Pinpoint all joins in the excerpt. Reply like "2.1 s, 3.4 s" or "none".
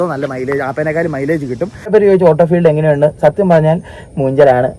1.9 s